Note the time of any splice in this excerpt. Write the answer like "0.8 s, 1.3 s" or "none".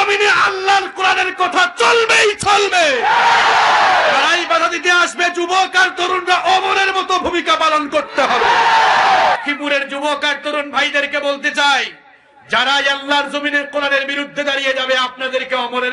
9.4 s